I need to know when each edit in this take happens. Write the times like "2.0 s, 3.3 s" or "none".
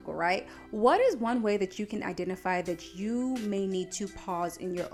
none